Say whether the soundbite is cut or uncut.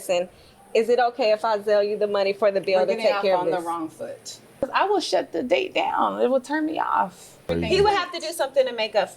cut